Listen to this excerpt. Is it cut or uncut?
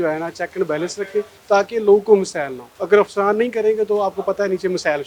cut